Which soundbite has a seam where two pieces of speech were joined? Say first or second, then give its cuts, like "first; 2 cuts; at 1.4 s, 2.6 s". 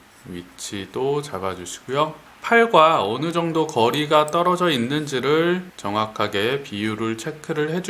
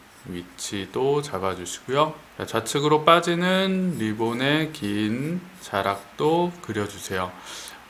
first; 1 cut; at 2.3 s